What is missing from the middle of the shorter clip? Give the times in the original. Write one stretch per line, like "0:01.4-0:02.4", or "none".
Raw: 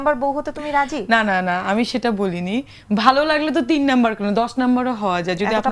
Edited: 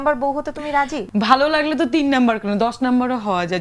0:01.0-0:02.7